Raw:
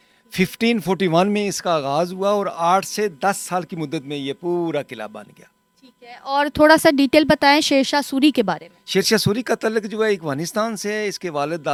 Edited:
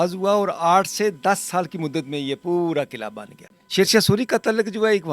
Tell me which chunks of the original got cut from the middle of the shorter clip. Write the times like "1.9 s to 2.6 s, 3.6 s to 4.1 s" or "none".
5.5 s to 8.7 s